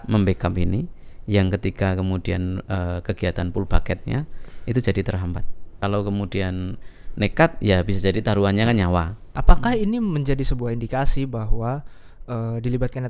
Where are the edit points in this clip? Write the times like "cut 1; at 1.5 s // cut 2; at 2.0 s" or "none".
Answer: cut 1; at 5.8 s // cut 2; at 9.3 s